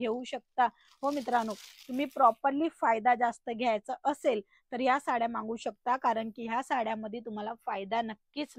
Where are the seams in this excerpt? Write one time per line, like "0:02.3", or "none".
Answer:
none